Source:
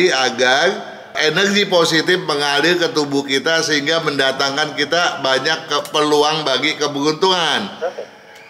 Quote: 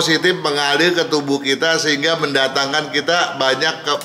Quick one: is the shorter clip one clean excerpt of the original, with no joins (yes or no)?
yes